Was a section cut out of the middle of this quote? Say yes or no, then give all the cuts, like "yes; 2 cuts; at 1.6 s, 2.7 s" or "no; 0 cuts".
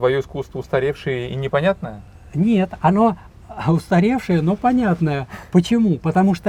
no; 0 cuts